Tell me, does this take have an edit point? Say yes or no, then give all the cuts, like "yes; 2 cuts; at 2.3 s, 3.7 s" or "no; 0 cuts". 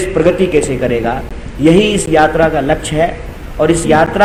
no; 0 cuts